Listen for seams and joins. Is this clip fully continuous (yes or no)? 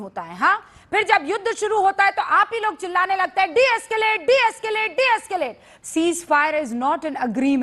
no